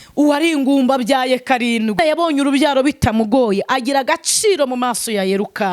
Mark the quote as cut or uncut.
cut